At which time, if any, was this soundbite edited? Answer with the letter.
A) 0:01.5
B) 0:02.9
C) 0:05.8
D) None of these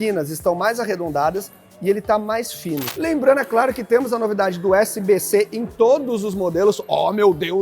B